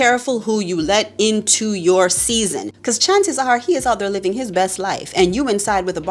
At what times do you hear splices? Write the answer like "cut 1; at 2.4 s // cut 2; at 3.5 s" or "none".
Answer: cut 1; at 2.7 s